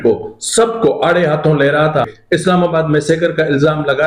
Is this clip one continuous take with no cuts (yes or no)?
no